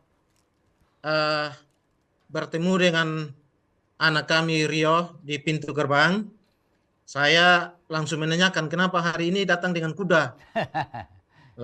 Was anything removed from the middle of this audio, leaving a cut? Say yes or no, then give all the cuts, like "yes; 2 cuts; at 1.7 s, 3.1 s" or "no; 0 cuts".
no; 0 cuts